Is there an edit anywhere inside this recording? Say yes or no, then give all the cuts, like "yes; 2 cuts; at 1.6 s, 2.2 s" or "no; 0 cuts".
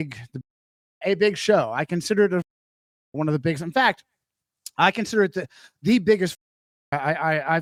no; 0 cuts